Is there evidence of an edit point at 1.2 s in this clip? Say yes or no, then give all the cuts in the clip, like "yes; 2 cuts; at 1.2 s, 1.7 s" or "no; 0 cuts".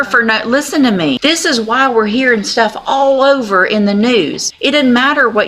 yes; 2 cuts; at 1.2 s, 4.5 s